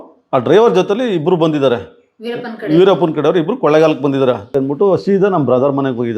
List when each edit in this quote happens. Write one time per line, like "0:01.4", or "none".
0:04.5